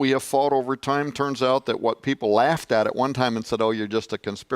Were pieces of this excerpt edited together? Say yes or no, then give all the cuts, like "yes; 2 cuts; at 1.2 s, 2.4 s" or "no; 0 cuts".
yes; 1 cut; at 1.3 s